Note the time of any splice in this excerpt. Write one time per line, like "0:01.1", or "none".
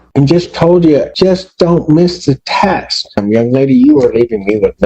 0:01.1
0:03.2